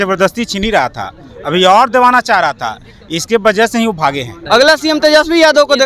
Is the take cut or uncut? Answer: cut